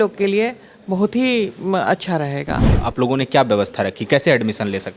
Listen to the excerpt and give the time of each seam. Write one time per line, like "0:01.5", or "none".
0:02.7